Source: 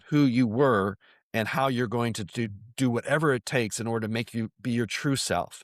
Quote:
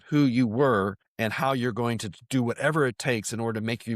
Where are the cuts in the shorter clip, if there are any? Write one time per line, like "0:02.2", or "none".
0:01.0
0:02.1